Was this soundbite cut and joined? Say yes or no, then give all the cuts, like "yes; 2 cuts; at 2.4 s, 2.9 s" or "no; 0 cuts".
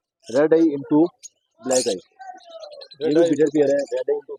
no; 0 cuts